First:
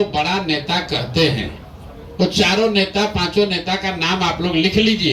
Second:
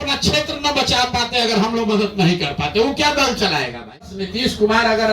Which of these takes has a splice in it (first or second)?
second